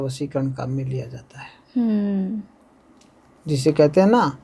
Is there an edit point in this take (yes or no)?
no